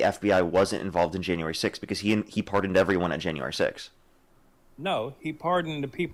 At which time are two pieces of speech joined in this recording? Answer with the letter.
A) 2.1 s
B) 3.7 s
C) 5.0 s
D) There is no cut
D